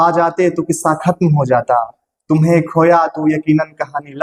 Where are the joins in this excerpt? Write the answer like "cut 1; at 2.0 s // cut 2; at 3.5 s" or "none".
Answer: none